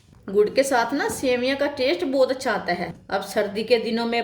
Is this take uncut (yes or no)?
no